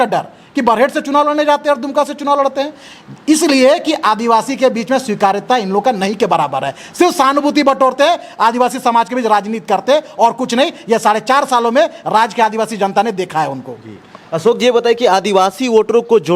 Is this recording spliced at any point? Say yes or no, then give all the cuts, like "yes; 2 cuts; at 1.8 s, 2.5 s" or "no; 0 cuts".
no; 0 cuts